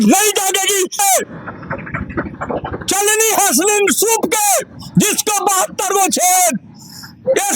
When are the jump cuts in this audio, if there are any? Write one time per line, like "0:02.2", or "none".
0:01.0